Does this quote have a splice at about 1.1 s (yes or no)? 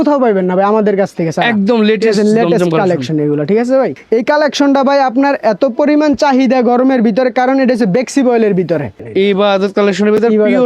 no